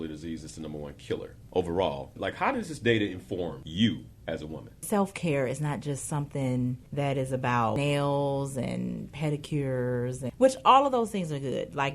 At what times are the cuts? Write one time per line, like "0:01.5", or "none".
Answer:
0:01.4
0:02.2
0:03.6
0:04.8
0:06.8
0:07.8
0:10.2